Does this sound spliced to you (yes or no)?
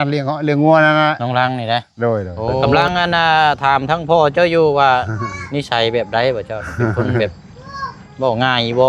yes